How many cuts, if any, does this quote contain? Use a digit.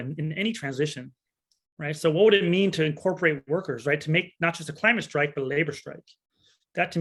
0